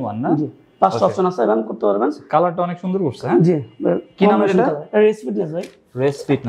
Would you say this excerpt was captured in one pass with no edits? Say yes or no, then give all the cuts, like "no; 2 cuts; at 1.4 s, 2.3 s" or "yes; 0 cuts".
yes; 0 cuts